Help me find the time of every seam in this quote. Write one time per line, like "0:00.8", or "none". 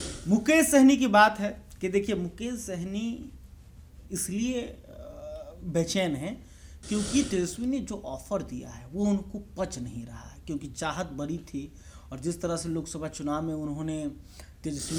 none